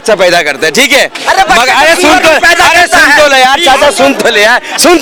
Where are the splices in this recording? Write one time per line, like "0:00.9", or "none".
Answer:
none